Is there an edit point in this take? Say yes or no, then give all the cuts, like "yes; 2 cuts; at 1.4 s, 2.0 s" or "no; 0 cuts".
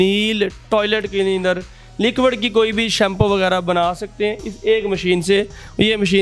no; 0 cuts